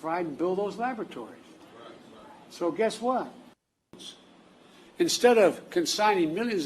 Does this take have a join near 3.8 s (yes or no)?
yes